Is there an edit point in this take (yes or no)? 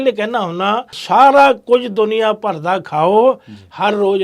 yes